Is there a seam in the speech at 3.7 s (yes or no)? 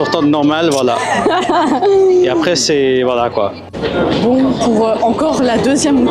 yes